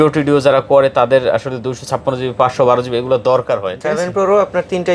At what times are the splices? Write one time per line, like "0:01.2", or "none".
0:03.7

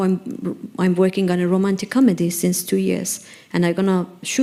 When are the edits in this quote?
none

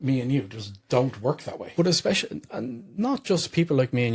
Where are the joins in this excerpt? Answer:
none

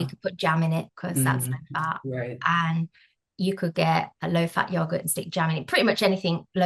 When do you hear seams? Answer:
0:00.9

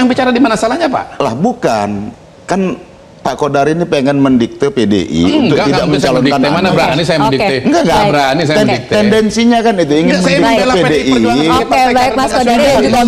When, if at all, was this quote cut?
none

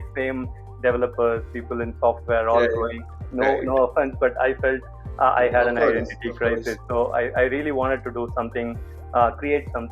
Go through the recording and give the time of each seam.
0:03.2

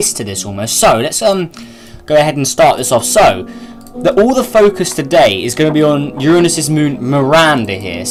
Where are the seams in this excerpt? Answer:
none

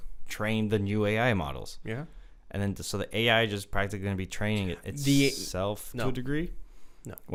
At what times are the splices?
none

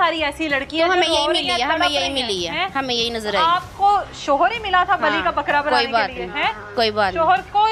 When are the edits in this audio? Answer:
none

